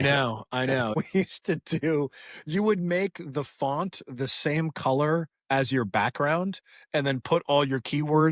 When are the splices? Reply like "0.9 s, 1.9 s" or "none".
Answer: 1.0 s